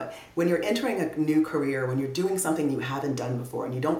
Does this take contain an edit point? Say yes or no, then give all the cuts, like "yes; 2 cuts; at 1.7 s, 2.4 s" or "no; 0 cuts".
no; 0 cuts